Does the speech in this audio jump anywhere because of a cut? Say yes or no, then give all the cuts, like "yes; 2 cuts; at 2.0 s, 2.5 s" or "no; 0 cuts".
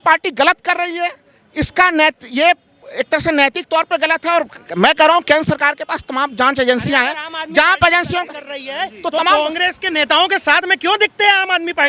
no; 0 cuts